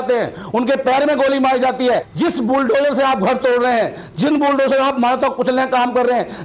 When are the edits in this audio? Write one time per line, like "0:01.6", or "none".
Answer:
0:02.0